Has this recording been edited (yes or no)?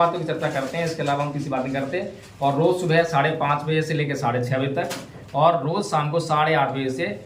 no